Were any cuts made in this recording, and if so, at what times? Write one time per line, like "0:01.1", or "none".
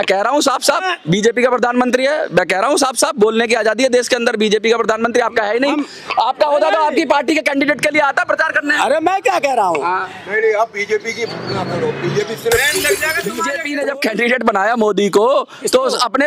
0:13.5